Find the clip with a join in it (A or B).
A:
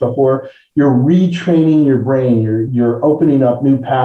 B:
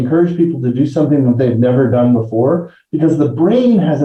A